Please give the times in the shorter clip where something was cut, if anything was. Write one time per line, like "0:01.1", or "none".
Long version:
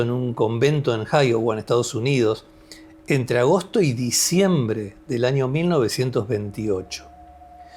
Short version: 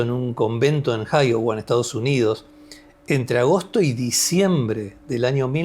none